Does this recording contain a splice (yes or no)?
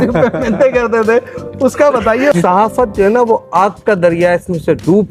yes